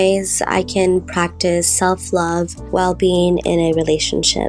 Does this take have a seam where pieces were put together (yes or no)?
yes